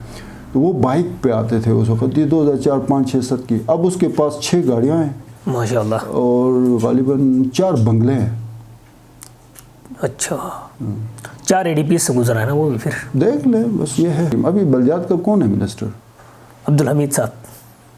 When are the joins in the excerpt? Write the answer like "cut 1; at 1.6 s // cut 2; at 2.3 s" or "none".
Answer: cut 1; at 14.3 s